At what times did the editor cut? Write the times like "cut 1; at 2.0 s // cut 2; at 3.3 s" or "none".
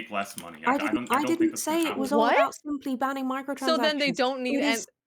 none